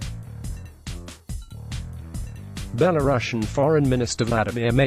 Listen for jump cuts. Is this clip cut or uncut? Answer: uncut